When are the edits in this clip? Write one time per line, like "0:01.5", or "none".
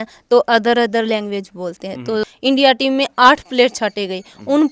0:02.2